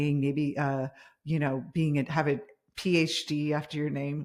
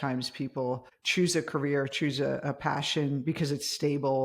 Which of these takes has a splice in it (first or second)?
second